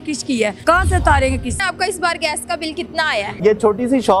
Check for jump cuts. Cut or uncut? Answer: cut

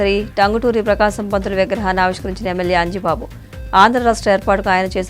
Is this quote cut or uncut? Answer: uncut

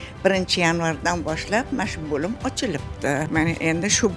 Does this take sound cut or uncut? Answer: cut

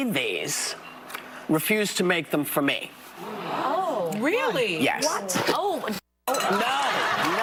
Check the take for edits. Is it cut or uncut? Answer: uncut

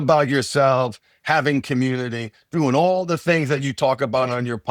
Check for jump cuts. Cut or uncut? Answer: uncut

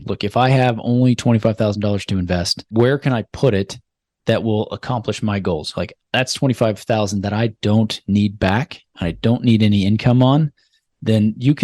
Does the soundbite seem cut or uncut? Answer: cut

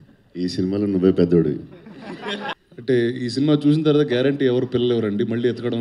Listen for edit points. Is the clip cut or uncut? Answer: cut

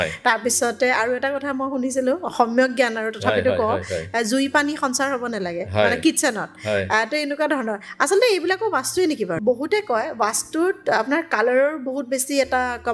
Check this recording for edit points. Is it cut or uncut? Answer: cut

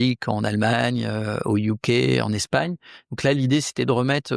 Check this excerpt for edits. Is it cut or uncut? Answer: uncut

